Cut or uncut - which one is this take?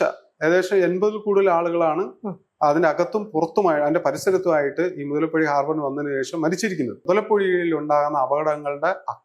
cut